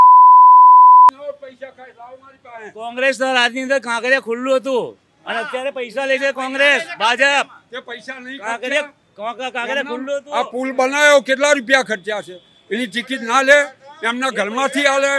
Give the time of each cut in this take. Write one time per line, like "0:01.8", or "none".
0:01.1